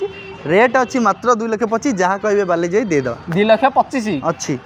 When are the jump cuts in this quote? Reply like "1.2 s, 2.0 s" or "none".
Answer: none